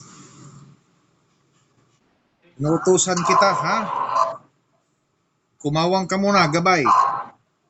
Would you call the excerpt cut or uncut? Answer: uncut